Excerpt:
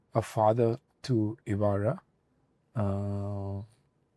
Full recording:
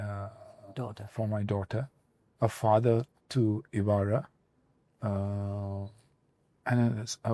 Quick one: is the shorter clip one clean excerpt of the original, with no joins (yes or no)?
yes